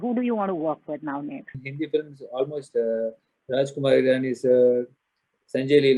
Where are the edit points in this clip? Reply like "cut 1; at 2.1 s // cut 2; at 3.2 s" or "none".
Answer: cut 1; at 1.7 s